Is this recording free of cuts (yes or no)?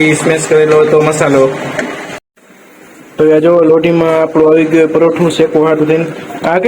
no